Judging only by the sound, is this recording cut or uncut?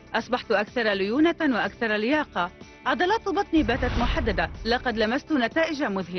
uncut